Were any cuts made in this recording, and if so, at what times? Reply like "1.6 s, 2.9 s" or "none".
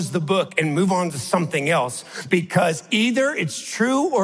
none

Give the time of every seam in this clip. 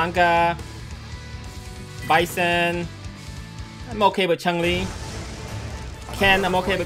none

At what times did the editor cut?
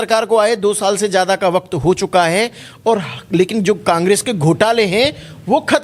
none

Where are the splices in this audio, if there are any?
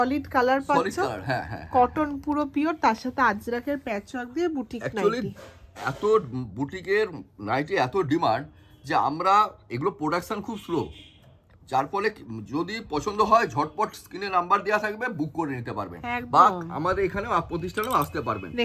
none

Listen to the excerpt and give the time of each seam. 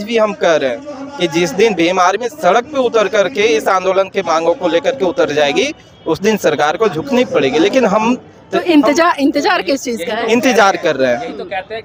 none

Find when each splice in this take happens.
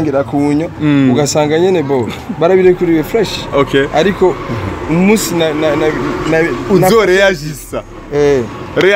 none

